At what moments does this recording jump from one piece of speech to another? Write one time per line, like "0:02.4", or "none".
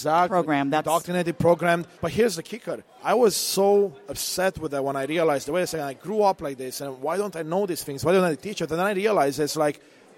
0:01.9
0:02.9